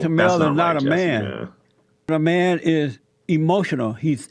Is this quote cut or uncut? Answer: cut